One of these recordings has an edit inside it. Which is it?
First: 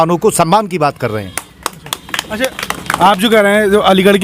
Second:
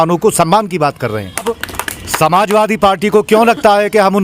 second; 1 cut; at 1.4 s

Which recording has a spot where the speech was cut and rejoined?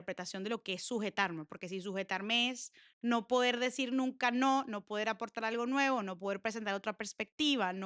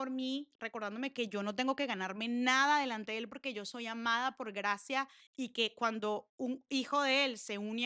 second; 1 cut; at 5.2 s

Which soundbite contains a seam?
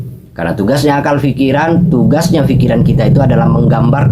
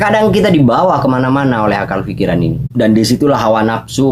second; 1 cut; at 2.6 s

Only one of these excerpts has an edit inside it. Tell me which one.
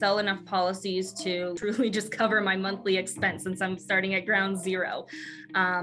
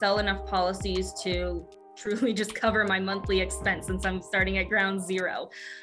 first; 1 cut; at 1.6 s

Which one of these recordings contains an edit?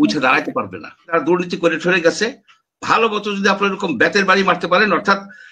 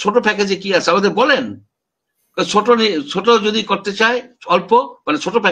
first; 1 cut; at 1.1 s

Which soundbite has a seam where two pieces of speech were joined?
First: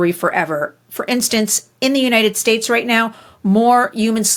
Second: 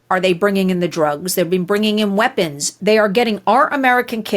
second; 1 cut; at 2.7 s

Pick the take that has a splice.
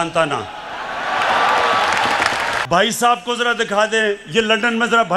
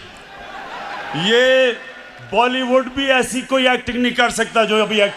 first; 1 cut; at 2.6 s

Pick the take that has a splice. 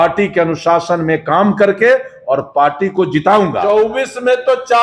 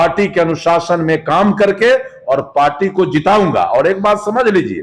first; 1 cut; at 3.6 s

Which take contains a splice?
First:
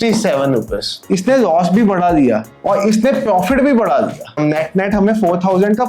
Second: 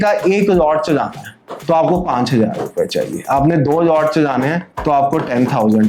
first; 2 cuts; at 0.9 s, 4.4 s

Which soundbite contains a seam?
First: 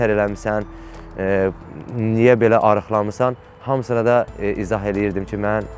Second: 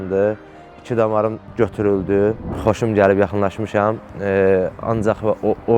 second; 1 cut; at 2.5 s

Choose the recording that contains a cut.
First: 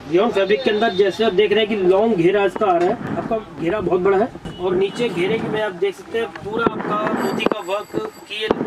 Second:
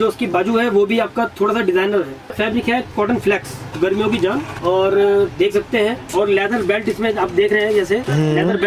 second; 4 cuts; at 2.3 s, 3.7 s, 4.6 s, 6.1 s

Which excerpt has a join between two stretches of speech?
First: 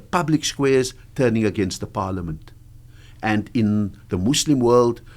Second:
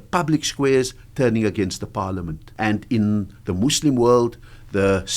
second; 1 cut; at 2.4 s

